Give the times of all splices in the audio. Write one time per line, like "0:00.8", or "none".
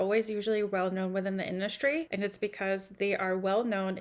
0:02.1